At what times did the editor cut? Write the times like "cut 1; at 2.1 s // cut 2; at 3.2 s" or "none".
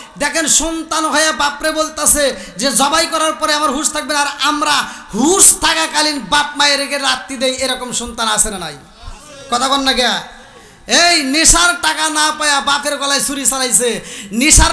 none